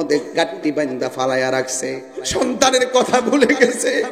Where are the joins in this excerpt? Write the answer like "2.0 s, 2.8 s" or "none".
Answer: 2.3 s